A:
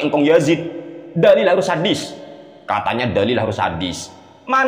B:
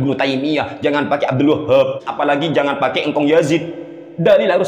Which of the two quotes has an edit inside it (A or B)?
B